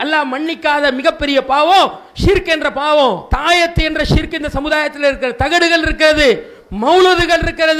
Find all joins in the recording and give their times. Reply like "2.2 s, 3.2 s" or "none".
3.3 s